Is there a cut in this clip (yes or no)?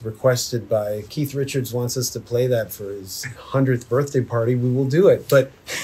yes